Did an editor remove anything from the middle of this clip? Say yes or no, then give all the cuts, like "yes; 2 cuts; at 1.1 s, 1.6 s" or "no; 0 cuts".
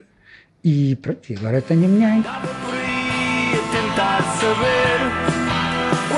yes; 1 cut; at 2.4 s